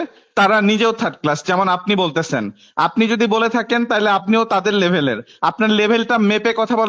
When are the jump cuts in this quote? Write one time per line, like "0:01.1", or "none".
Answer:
none